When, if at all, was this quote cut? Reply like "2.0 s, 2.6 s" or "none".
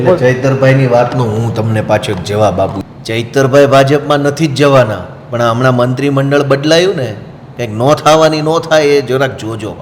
2.8 s